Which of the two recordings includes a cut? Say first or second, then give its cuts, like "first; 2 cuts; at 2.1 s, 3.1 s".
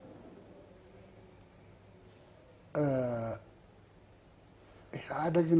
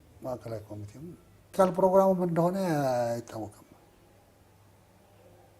second; 1 cut; at 1.5 s